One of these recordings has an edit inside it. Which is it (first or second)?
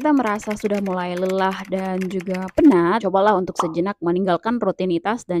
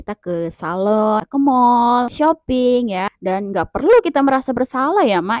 second